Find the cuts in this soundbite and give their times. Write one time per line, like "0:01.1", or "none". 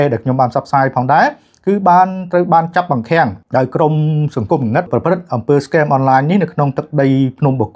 0:03.4
0:04.9